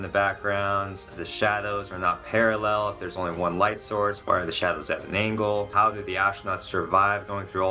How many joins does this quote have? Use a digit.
3